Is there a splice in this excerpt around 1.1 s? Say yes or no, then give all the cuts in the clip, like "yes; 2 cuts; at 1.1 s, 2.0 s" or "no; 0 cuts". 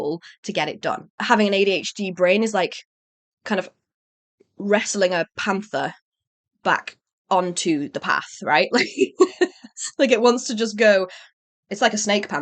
yes; 1 cut; at 1.1 s